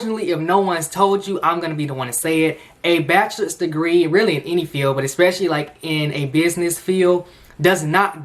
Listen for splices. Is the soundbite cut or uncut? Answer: uncut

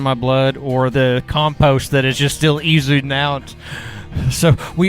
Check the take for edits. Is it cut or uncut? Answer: cut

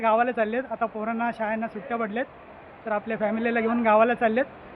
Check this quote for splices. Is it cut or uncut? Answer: uncut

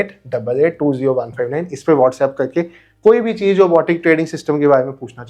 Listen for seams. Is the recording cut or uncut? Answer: uncut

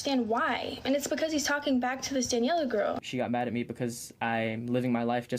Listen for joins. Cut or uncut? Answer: cut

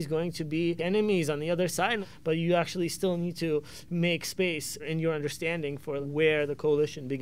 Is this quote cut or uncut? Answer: cut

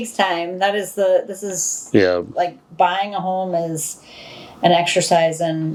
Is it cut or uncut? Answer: uncut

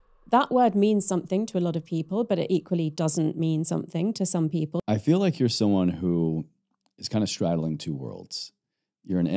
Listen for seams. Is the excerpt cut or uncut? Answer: cut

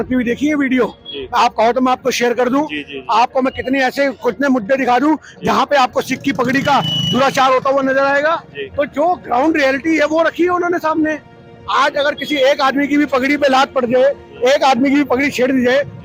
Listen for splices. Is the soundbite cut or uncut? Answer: uncut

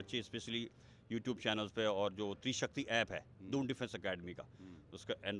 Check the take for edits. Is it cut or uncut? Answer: uncut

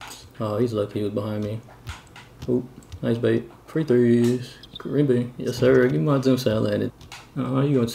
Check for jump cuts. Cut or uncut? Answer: cut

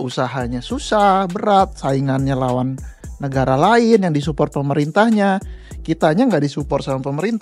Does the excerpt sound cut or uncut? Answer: uncut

